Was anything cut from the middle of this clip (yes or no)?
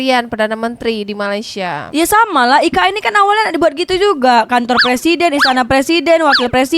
no